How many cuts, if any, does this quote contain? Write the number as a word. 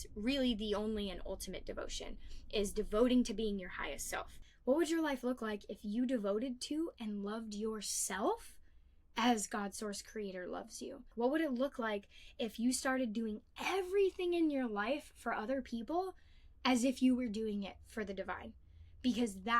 two